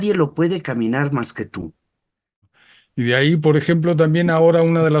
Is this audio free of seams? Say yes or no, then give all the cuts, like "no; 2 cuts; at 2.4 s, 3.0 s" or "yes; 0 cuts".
no; 1 cut; at 2.5 s